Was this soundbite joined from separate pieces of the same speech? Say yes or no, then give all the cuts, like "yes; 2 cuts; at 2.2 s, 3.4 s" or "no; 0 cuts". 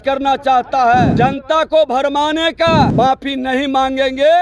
yes; 2 cuts; at 1.1 s, 2.9 s